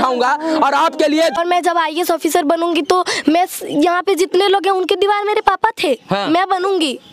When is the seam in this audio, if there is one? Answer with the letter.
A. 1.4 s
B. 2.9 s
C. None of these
A